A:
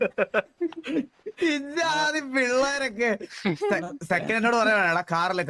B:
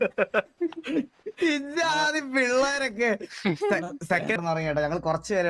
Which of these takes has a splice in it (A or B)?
B